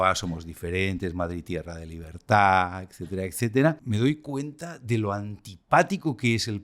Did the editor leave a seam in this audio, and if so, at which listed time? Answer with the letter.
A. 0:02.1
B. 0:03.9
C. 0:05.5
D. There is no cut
B